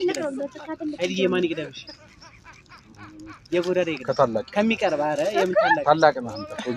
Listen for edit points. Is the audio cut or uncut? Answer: uncut